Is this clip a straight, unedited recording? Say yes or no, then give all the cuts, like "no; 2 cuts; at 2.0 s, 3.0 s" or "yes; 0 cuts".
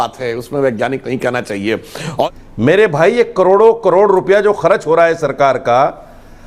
no; 1 cut; at 1.8 s